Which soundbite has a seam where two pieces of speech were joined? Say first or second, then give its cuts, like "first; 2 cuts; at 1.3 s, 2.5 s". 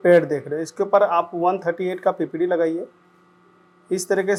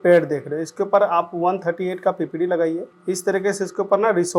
second; 1 cut; at 2.9 s